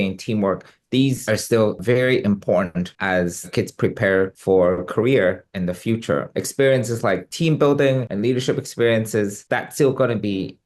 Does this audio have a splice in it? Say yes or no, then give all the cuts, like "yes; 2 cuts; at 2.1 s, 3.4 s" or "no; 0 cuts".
yes; 2 cuts; at 6.3 s, 9.4 s